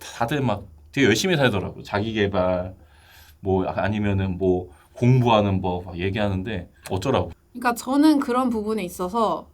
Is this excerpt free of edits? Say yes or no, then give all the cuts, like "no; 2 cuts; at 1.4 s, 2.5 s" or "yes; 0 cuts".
no; 1 cut; at 7.3 s